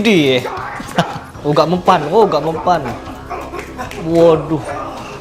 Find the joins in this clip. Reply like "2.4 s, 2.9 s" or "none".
1.2 s